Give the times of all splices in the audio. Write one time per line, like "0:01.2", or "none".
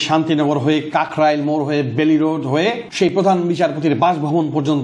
0:02.9

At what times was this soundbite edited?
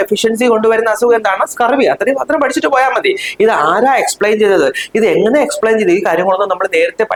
none

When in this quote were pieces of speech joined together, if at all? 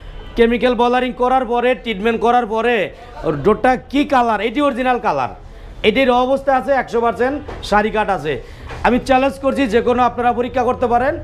none

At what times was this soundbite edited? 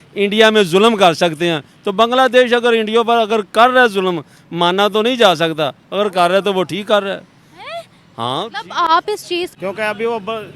0:09.5

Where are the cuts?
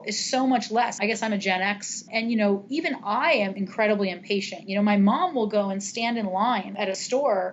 0:00.9
0:02.1
0:03.6
0:06.8

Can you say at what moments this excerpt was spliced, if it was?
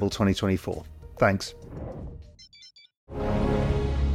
0:01.6

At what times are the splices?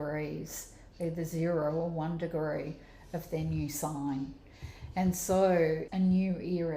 0:05.9

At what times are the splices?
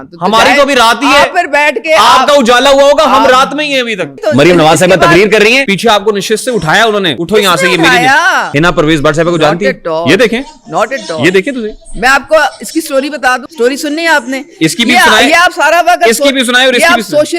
0:04.2
0:05.7
0:07.2
0:08.4
0:13.5

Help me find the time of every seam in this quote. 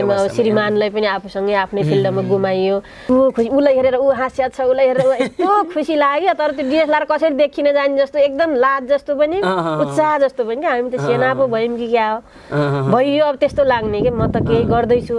0:02.9

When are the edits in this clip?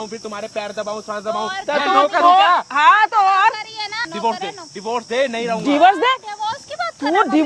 0:04.0

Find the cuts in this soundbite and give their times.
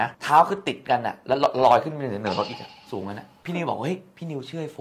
0:03.4

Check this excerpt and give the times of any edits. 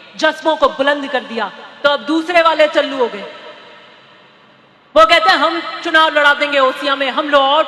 none

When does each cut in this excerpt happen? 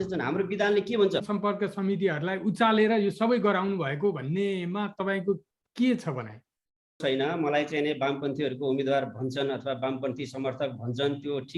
0:01.3
0:07.0

